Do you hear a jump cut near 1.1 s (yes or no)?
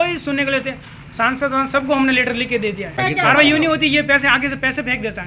no